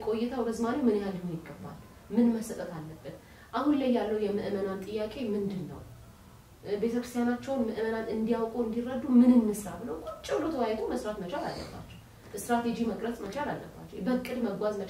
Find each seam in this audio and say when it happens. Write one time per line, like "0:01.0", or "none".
none